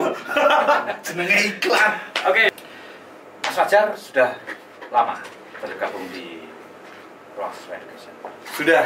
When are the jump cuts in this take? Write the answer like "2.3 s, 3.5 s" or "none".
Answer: 2.5 s